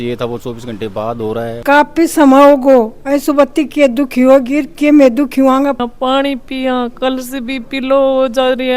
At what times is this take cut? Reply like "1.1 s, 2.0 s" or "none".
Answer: 1.6 s, 5.8 s